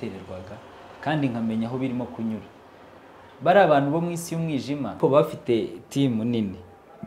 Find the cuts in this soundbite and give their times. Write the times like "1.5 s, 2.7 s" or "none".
5.0 s